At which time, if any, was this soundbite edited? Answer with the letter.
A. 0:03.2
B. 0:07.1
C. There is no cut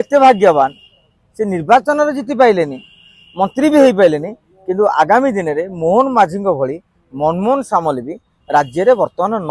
C